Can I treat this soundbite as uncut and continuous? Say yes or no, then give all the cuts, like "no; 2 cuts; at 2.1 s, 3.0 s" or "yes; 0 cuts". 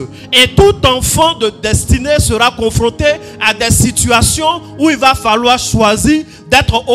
yes; 0 cuts